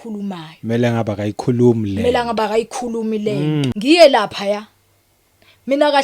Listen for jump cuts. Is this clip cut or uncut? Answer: cut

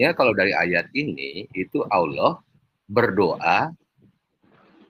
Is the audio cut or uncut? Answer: uncut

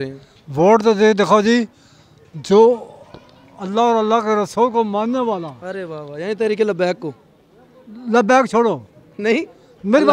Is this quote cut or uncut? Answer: uncut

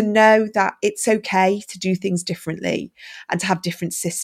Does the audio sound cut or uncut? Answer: uncut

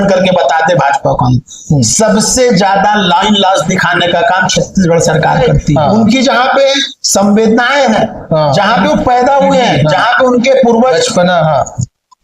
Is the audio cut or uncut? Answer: cut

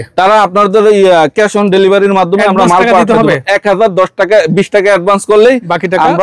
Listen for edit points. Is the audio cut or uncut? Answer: uncut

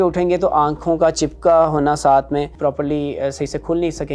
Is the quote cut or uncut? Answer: cut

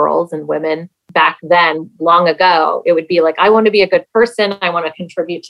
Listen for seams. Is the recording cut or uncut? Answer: cut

